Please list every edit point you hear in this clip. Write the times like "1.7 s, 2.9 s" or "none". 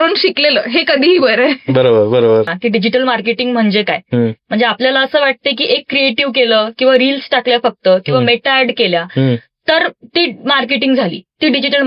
2.5 s